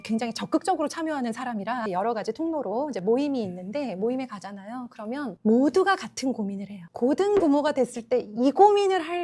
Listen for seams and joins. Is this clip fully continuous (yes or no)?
no